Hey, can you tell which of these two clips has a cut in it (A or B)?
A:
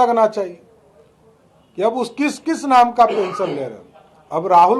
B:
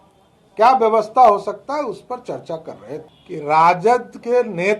B